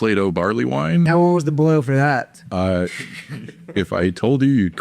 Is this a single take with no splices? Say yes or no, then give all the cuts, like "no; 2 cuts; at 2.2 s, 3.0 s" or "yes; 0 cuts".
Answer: no; 1 cut; at 1.1 s